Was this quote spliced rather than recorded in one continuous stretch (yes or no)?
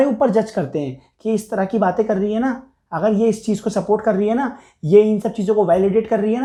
no